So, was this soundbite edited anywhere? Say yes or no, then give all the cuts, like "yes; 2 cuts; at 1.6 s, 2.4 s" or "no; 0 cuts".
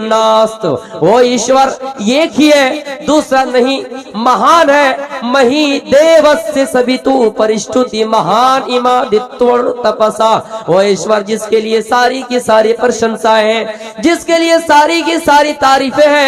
no; 0 cuts